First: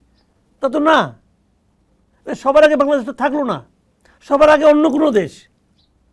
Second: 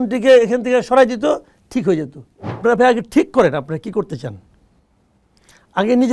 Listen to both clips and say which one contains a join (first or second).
second